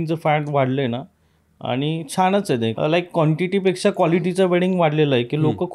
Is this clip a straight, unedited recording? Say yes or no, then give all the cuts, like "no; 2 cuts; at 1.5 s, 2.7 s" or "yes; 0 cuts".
no; 1 cut; at 2.7 s